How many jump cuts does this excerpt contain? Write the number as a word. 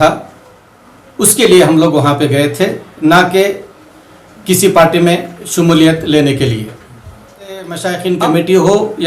one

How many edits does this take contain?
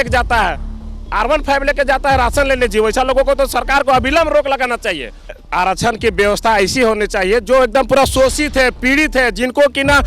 one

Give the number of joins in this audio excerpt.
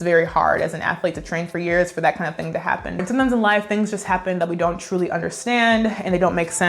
one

